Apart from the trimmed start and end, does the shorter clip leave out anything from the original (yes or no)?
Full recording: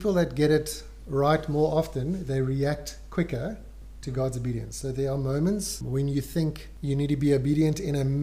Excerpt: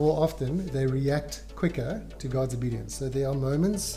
yes